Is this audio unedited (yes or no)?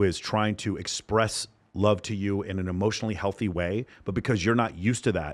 yes